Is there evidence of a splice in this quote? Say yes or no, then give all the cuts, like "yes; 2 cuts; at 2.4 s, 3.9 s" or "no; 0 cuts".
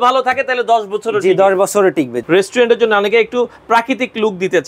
yes; 1 cut; at 2.2 s